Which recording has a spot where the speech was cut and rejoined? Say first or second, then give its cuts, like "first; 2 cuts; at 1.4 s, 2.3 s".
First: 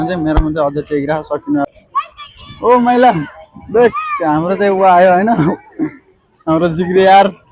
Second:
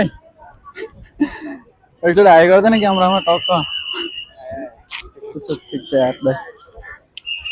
first; 1 cut; at 1.7 s